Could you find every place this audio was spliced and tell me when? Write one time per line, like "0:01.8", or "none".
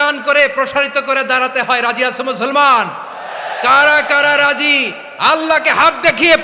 none